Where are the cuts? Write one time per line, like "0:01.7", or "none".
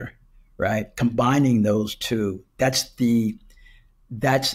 none